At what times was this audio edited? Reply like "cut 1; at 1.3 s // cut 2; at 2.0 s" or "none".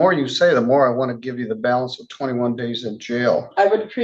none